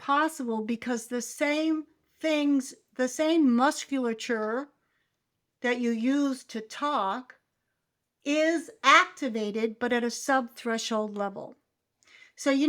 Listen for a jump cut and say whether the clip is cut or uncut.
uncut